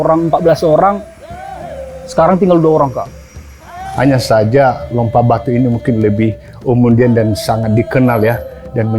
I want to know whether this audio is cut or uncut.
cut